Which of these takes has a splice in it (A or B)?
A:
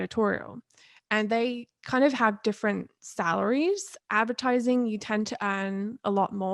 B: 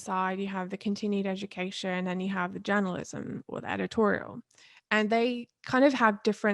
A